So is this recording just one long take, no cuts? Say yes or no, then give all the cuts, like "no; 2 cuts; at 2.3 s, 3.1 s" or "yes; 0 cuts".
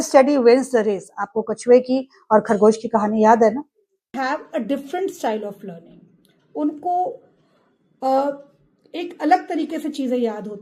no; 1 cut; at 4.1 s